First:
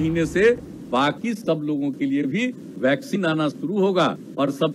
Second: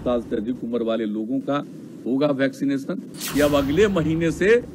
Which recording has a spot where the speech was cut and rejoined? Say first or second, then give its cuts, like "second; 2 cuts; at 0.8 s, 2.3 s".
second; 1 cut; at 3.1 s